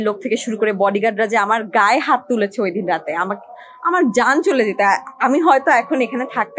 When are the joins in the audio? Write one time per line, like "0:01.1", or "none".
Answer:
none